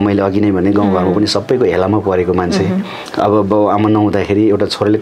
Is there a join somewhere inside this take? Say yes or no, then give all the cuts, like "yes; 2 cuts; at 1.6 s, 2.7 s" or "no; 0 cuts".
no; 0 cuts